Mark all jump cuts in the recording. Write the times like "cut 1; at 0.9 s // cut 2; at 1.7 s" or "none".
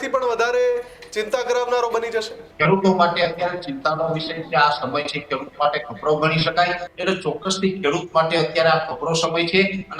cut 1; at 2.4 s // cut 2; at 6.9 s